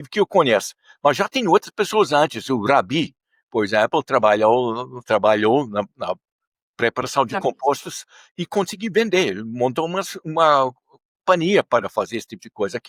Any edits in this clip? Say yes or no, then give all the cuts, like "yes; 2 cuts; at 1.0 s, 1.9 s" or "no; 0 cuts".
no; 0 cuts